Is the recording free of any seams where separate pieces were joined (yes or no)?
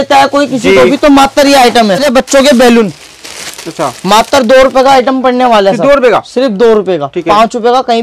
no